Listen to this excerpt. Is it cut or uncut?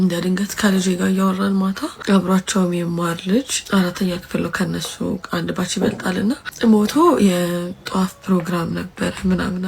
cut